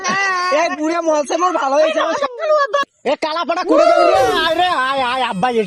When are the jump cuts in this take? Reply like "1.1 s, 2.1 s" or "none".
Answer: 2.9 s